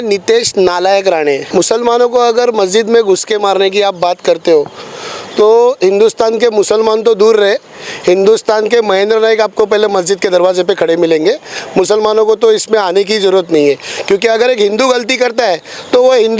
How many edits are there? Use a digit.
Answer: 1